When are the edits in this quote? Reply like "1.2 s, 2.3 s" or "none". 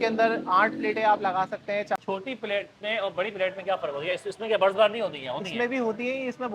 2.0 s